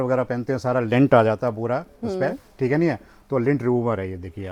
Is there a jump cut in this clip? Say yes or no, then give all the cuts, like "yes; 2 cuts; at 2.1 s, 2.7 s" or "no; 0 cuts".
no; 0 cuts